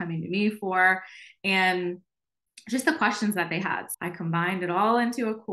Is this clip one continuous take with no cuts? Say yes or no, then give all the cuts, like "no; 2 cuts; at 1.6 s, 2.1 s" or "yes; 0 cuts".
no; 1 cut; at 3.9 s